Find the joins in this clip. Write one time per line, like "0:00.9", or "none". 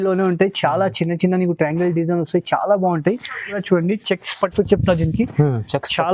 0:03.6